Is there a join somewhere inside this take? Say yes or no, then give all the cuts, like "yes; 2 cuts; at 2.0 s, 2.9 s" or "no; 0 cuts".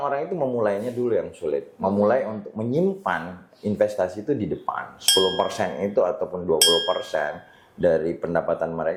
no; 0 cuts